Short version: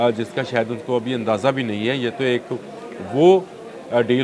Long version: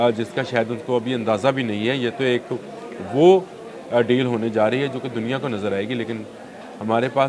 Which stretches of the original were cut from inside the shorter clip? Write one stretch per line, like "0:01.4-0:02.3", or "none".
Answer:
none

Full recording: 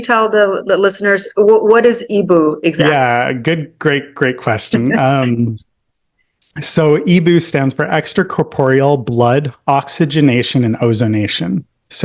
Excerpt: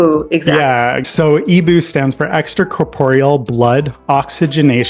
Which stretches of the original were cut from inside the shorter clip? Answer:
0:03.4-0:06.6

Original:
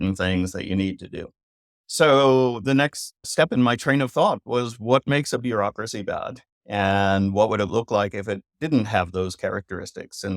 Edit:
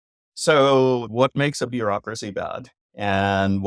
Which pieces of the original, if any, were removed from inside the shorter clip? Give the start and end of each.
0:02.6-0:04.8

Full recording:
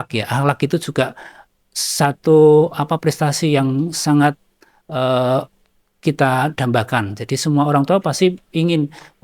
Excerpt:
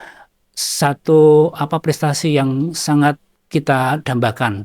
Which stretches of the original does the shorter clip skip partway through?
0:04.5-0:05.8

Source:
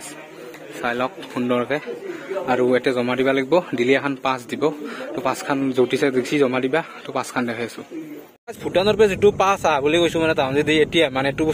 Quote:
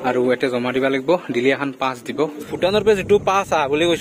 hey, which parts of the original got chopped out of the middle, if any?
0:04.9-0:08.6

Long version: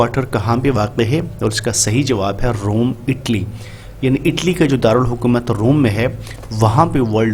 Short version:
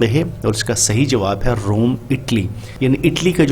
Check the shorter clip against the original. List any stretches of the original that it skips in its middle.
0:03.6-0:03.8

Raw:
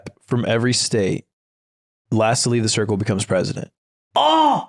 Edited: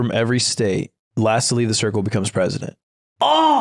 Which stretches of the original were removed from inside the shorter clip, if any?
0:01.3-0:01.9

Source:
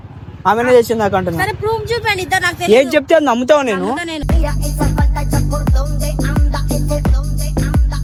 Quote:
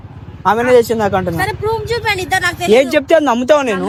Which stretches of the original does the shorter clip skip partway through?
none

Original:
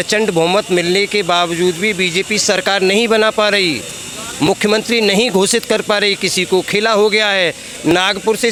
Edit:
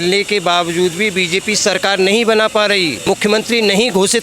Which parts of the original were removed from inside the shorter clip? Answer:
0:03.9-0:04.5

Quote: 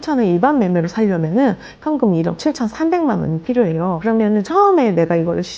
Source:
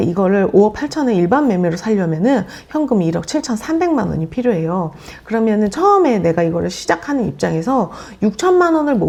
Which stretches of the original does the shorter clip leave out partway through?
0:04.9-0:05.2

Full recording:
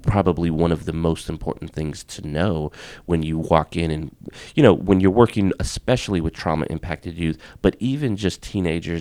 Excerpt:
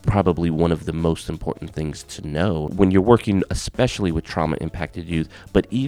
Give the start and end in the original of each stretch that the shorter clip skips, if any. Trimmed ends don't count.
0:02.7-0:04.8

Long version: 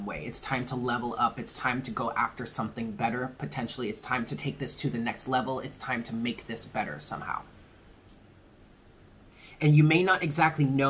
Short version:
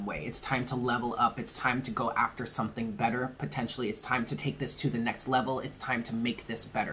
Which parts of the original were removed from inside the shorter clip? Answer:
none

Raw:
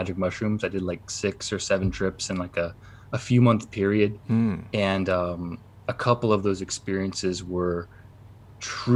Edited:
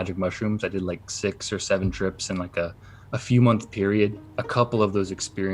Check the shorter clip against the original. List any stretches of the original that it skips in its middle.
0:04.2-0:05.7

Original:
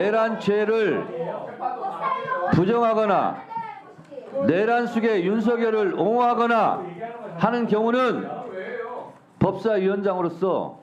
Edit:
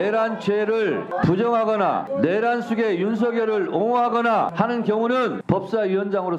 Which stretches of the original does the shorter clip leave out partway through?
0:01.1-0:02.4
0:03.4-0:04.3
0:06.8-0:07.4
0:08.2-0:09.3

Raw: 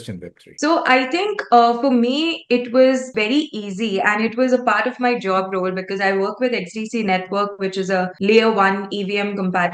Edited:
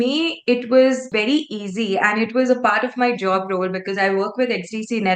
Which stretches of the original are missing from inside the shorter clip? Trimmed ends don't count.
none

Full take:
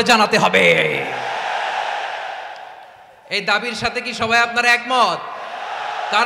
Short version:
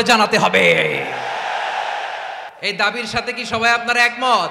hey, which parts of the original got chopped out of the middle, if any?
0:02.5-0:03.2

